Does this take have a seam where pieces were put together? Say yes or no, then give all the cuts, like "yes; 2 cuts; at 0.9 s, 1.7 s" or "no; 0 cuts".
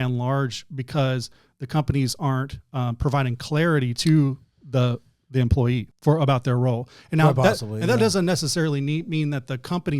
yes; 1 cut; at 5.9 s